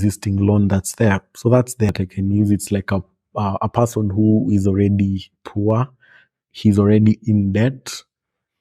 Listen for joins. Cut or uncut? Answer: cut